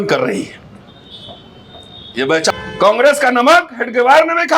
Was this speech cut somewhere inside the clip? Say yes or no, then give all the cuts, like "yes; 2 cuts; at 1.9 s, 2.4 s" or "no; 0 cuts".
yes; 1 cut; at 2.5 s